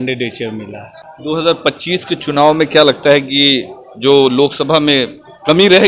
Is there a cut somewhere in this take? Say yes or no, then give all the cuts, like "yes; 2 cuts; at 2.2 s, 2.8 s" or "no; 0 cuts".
yes; 1 cut; at 1.0 s